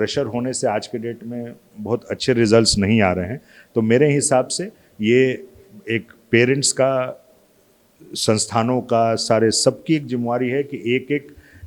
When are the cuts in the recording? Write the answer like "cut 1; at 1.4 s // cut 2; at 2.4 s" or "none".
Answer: none